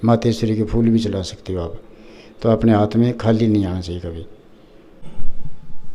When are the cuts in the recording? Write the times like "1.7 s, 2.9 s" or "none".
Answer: 5.0 s